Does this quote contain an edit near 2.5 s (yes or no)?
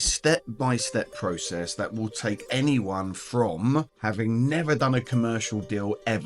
no